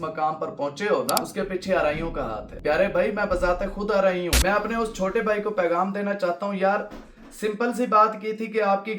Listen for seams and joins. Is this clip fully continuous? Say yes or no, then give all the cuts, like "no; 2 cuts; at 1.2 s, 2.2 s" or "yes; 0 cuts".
no; 3 cuts; at 1.3 s, 2.5 s, 4.4 s